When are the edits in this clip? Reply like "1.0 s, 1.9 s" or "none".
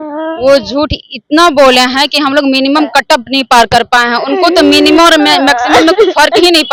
none